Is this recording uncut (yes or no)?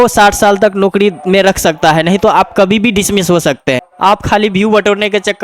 no